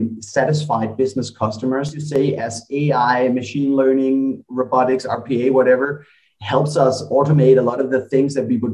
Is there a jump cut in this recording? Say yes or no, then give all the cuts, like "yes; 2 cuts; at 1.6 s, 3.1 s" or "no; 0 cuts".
yes; 1 cut; at 2.0 s